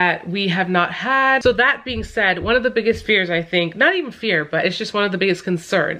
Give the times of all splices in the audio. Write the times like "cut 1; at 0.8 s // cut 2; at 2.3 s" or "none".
cut 1; at 1.4 s